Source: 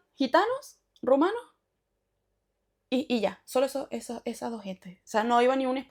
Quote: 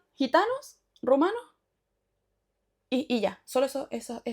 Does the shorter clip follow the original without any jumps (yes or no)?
yes